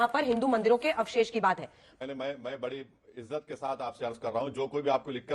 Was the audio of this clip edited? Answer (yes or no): yes